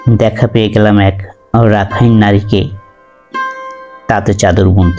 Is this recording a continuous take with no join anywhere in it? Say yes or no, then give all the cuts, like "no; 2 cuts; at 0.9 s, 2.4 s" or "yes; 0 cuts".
yes; 0 cuts